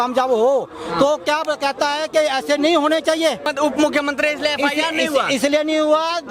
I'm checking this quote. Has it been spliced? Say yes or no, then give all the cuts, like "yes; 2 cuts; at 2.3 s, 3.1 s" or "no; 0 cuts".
yes; 1 cut; at 3.5 s